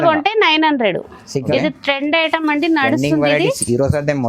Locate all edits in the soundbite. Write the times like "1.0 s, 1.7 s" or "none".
1.5 s